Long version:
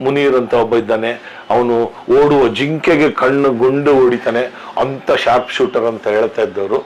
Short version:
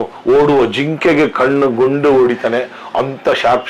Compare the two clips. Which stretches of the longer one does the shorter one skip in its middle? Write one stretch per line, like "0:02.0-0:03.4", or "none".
none